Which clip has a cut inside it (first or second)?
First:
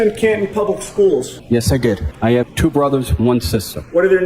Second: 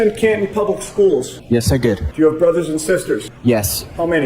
first